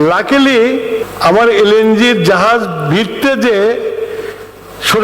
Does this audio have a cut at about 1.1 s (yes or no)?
yes